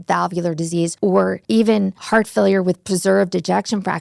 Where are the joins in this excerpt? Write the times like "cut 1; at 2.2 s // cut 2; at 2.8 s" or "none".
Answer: cut 1; at 1.2 s // cut 2; at 2.0 s